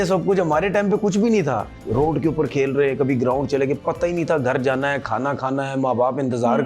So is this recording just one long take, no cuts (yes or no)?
no